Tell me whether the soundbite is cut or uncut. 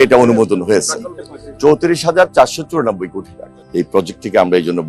cut